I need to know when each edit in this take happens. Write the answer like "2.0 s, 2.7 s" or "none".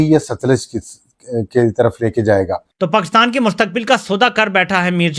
2.7 s